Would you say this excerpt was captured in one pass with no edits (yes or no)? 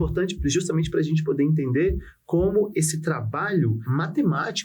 no